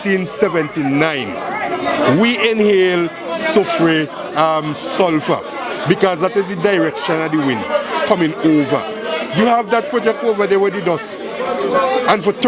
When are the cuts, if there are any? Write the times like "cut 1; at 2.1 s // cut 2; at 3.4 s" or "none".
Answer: none